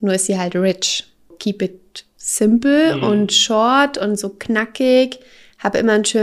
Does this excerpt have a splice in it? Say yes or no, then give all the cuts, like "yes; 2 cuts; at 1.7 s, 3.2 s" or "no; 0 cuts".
yes; 1 cut; at 1.3 s